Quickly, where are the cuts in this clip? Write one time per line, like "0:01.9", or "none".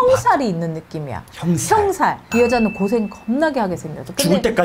0:02.2